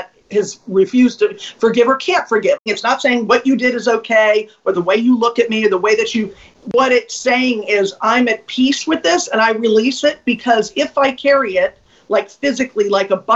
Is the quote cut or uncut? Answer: cut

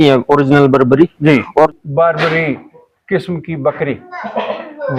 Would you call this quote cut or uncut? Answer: cut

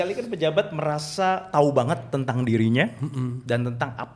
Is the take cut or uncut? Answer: uncut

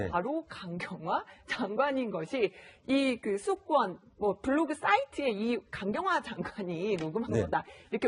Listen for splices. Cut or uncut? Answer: cut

